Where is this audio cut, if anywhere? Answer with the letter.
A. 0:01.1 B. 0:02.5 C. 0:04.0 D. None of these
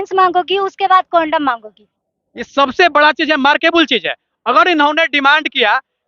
B